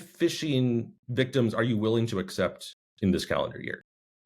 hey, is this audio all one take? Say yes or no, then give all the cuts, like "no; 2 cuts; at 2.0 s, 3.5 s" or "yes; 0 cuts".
no; 1 cut; at 1.0 s